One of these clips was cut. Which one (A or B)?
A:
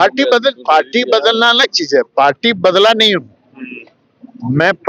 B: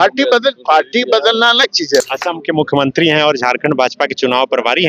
B